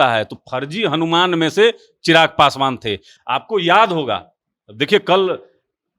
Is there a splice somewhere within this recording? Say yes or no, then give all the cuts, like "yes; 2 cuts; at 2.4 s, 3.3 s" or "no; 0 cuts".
no; 0 cuts